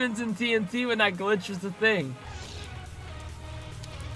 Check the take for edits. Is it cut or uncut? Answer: cut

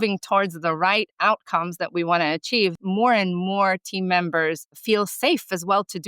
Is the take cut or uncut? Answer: cut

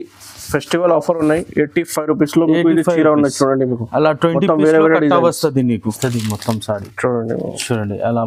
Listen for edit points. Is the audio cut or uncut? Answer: cut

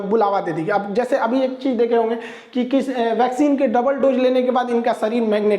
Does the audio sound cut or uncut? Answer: uncut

